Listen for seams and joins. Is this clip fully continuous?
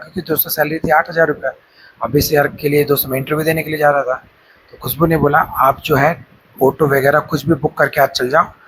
yes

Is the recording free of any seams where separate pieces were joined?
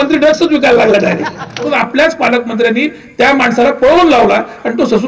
no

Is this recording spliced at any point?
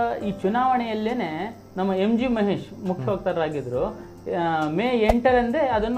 no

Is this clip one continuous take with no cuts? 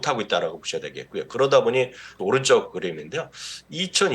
no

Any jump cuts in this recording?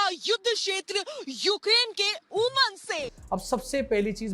yes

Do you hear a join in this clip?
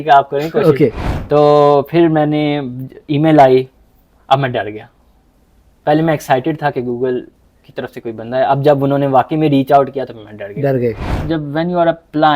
yes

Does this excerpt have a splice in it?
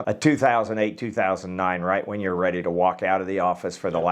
no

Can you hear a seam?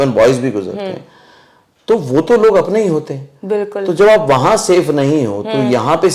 no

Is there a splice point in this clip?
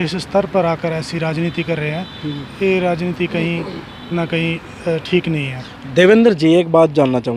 no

